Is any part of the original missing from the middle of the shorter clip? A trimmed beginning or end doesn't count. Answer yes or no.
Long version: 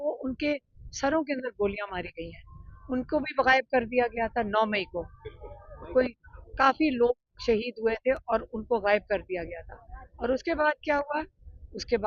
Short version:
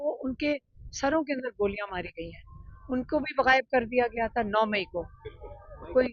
no